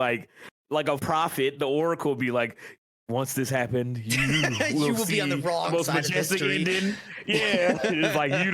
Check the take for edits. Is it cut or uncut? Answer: cut